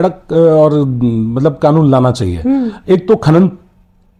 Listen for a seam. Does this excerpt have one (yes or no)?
no